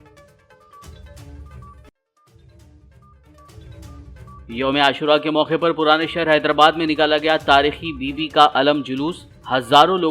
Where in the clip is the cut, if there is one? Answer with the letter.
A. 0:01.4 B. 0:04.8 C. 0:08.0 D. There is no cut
A